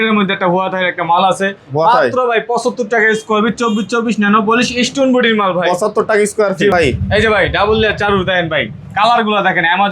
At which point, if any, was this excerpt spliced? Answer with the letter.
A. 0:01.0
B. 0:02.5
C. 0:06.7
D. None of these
C